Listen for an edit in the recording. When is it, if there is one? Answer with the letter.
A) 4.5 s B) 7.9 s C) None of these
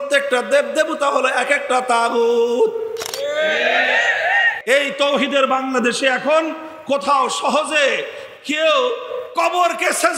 A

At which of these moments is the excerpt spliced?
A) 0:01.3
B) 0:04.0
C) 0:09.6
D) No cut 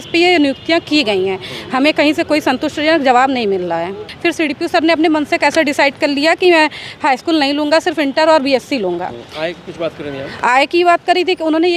B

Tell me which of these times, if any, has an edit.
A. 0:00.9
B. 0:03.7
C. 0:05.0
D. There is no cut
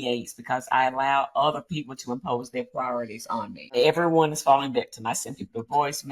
B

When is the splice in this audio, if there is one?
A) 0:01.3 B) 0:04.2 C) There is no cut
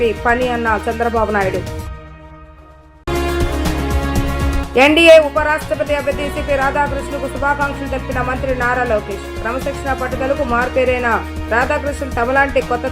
C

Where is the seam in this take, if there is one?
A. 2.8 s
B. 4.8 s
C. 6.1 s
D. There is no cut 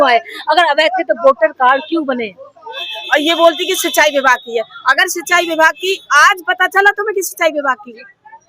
A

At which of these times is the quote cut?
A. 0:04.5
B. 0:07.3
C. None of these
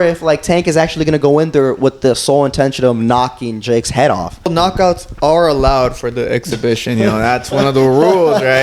A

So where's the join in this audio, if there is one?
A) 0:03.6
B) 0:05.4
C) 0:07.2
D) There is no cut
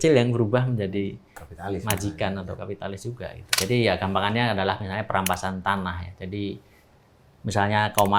A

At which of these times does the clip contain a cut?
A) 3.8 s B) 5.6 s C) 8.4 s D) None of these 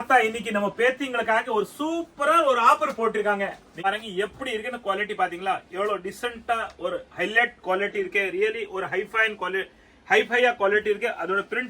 A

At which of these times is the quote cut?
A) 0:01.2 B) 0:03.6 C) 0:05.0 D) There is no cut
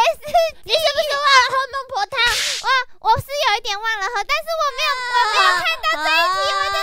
C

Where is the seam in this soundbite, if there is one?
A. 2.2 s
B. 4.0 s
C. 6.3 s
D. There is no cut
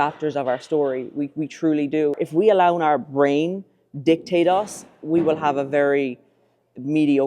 A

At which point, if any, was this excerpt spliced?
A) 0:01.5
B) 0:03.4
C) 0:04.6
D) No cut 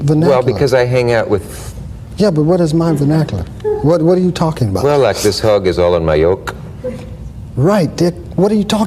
D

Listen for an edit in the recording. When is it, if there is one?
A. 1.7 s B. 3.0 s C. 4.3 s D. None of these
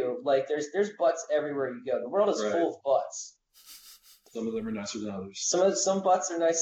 C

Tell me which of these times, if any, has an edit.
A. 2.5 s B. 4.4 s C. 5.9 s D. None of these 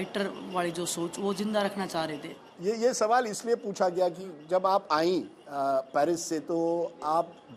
D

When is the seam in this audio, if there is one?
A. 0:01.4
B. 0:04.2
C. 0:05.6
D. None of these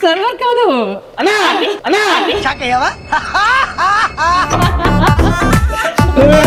D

